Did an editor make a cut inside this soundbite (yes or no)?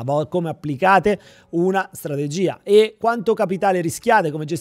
yes